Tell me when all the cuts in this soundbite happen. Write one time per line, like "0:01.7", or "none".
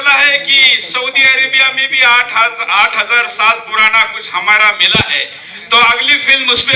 none

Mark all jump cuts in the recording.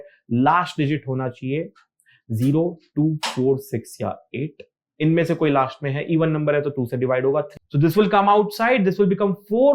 0:07.5

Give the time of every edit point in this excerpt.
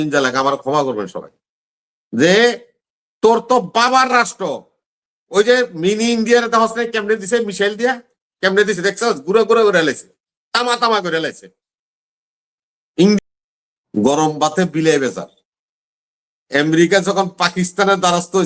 0:13.2

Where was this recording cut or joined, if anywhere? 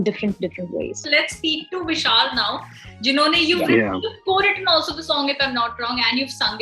none

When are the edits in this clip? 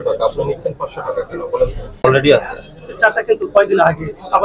0:02.0

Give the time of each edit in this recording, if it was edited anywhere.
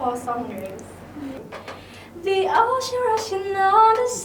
0:01.4

